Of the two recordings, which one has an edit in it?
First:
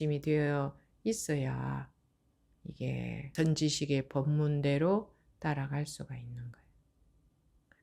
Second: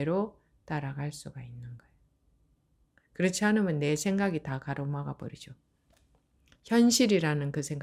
first; 1 cut; at 3.3 s

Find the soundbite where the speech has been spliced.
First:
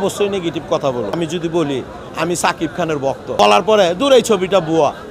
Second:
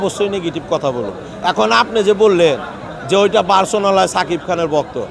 first; 2 cuts; at 1.2 s, 3.4 s

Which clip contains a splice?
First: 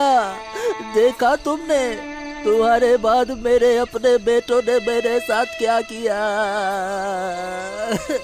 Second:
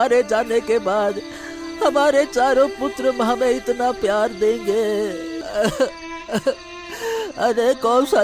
second; 1 cut; at 5.4 s

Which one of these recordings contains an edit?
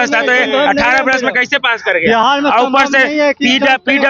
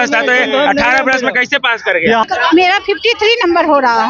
second; 1 cut; at 2.2 s

